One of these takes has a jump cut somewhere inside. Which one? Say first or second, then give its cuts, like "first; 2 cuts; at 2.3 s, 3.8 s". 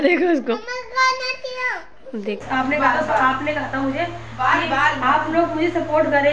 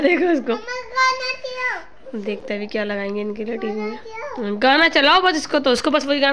first; 1 cut; at 2.4 s